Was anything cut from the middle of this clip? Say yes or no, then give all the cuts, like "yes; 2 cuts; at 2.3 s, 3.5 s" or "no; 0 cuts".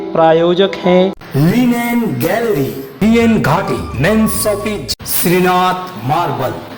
no; 0 cuts